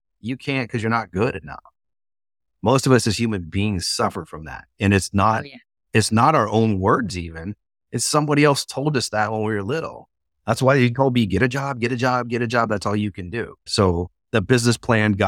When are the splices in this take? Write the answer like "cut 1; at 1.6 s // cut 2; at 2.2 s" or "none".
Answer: cut 1; at 13.6 s